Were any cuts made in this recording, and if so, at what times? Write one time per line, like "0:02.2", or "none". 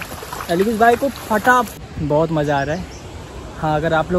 0:01.9